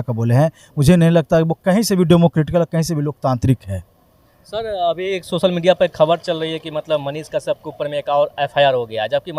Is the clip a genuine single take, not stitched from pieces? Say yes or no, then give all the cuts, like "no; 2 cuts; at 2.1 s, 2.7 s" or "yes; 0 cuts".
yes; 0 cuts